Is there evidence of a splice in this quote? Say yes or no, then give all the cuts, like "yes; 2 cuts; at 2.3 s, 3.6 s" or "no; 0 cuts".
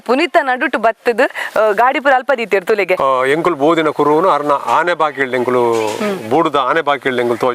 yes; 1 cut; at 3.0 s